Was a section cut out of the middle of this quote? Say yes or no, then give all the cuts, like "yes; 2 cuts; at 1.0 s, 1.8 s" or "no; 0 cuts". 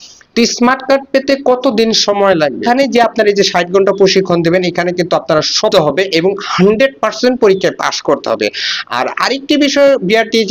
yes; 2 cuts; at 2.6 s, 5.7 s